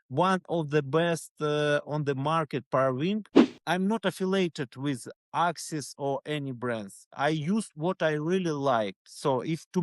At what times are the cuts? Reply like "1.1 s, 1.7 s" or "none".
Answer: 3.5 s